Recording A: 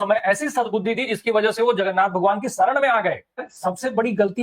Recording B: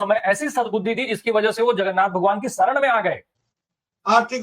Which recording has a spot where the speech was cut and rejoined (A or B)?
A